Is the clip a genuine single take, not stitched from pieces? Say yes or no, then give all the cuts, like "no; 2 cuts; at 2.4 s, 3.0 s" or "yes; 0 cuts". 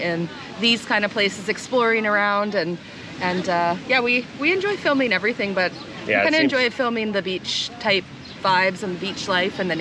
yes; 0 cuts